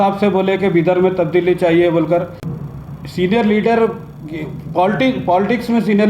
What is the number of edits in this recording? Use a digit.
1